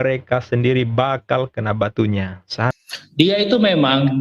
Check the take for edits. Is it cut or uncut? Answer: cut